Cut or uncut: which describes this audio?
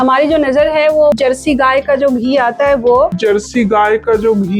cut